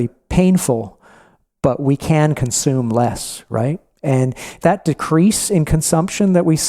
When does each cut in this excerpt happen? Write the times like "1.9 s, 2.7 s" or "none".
4.5 s